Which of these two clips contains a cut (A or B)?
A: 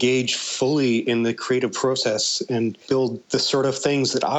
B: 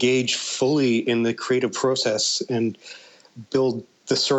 A